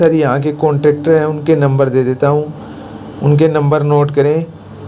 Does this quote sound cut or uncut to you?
uncut